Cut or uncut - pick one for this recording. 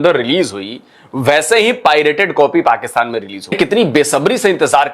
cut